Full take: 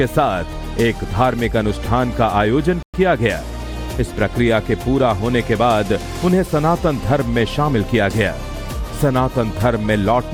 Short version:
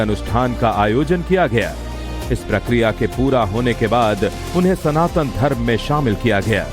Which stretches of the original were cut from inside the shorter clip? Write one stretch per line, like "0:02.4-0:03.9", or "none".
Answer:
0:02.8-0:02.9